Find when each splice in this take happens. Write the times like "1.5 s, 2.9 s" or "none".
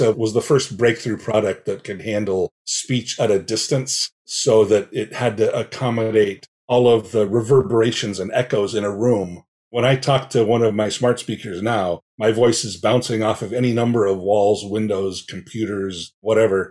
none

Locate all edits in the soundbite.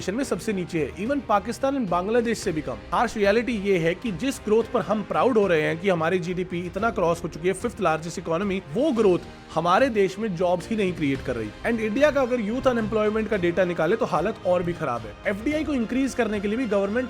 2.8 s, 11.5 s, 15.1 s

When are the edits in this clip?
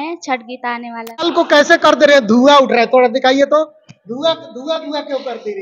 1.3 s

